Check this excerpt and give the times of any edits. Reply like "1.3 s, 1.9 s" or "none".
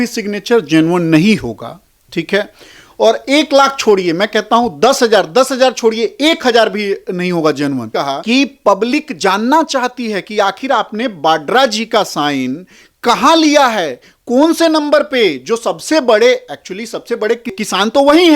7.9 s